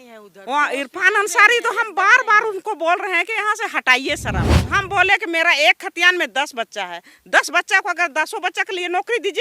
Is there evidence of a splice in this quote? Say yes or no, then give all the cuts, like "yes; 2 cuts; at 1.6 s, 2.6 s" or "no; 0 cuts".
yes; 1 cut; at 4.5 s